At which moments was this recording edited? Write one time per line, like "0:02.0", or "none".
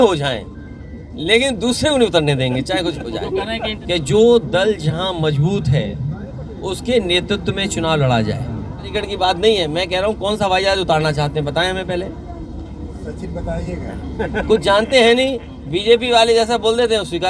0:03.8
0:09.0